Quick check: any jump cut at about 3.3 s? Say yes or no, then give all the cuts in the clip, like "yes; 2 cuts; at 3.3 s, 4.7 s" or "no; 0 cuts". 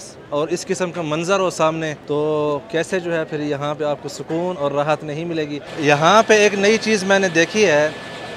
no; 2 cuts; at 2.0 s, 5.6 s